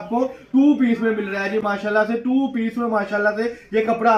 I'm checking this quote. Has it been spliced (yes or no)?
no